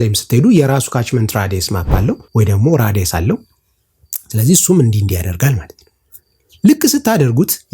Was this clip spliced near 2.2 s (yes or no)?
yes